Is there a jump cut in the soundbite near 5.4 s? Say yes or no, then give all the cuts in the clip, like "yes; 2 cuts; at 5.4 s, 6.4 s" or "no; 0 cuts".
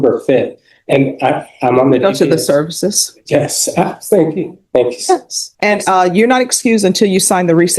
yes; 1 cut; at 5.4 s